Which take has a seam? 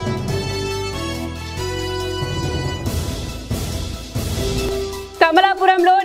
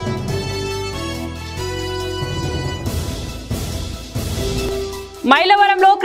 first; 1 cut; at 5.1 s

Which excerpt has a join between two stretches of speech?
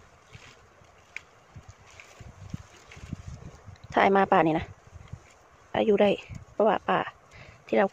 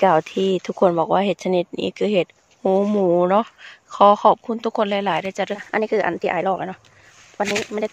second; 1 cut; at 5.3 s

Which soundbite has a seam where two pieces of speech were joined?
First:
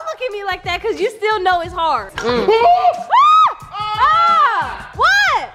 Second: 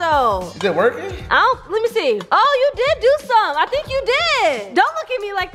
first; 1 cut; at 2.1 s

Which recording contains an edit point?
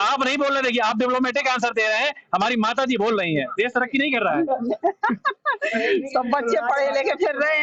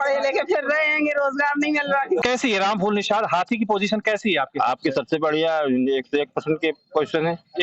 second; 1 cut; at 2.2 s

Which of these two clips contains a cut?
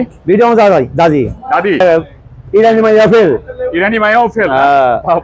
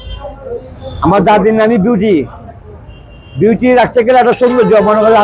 first; 1 cut; at 1.8 s

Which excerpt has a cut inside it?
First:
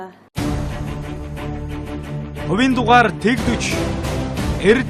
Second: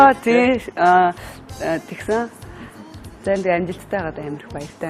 second; 1 cut; at 2.1 s

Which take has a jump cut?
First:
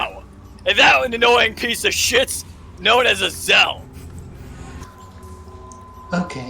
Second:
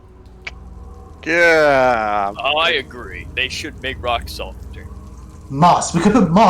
first; 1 cut; at 4.8 s

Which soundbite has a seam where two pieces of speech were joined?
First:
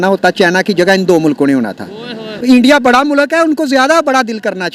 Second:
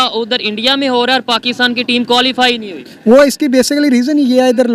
first; 1 cut; at 2.3 s

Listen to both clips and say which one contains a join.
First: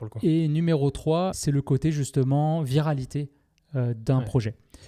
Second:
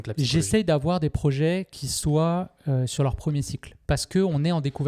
first; 1 cut; at 1.4 s

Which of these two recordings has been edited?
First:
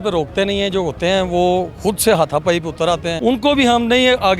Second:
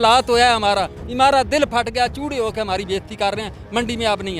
first; 1 cut; at 3.1 s

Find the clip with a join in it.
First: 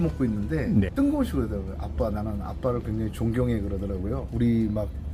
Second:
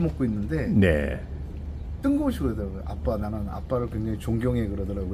first; 2 cuts; at 0.8 s, 4.2 s

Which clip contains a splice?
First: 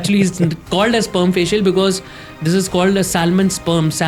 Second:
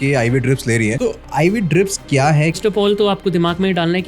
second; 2 cuts; at 1.0 s, 2.6 s

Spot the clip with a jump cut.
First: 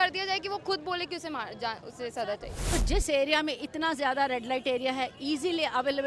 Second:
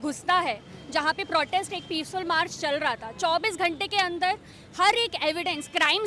first; 1 cut; at 2.5 s

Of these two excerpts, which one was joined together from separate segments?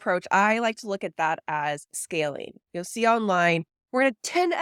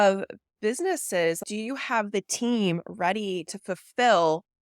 second; 1 cut; at 1.4 s

